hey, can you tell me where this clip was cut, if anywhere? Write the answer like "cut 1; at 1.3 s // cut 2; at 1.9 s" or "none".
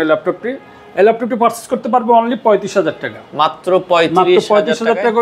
none